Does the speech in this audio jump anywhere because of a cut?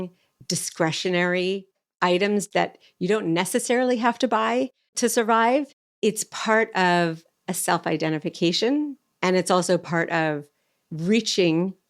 yes; 1 cut; at 2.5 s

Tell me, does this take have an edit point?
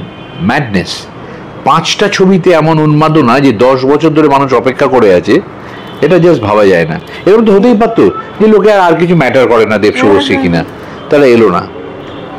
no; 0 cuts

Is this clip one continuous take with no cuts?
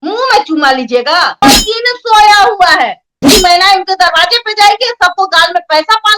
no; 2 cuts; at 1.4 s, 3.3 s

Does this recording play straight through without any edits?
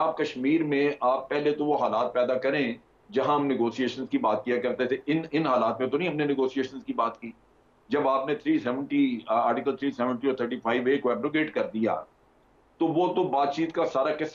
yes; 0 cuts

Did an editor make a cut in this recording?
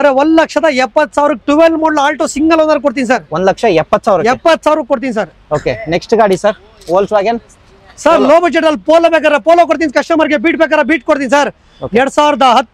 no; 0 cuts

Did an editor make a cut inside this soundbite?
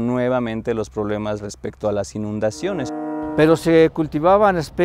yes; 1 cut; at 3.0 s

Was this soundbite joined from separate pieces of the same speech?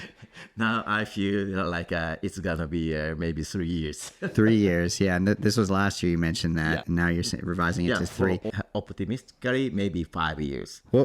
yes; 2 cuts; at 6.8 s, 8.6 s

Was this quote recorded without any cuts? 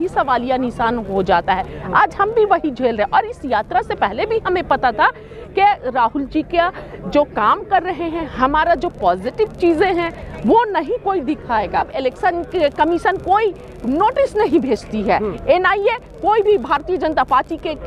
no; 1 cut; at 11.9 s

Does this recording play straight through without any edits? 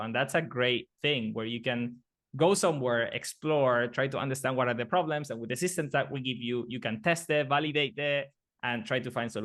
yes; 0 cuts

